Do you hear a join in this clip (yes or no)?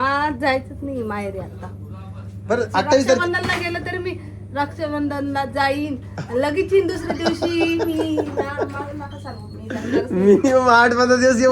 no